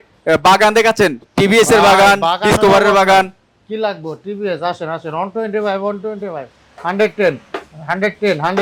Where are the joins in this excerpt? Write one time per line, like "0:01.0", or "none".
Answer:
none